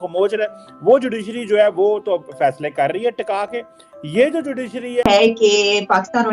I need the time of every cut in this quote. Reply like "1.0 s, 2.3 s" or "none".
5.0 s